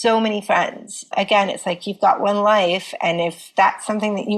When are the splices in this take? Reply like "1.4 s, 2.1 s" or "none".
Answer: 1.1 s, 3.4 s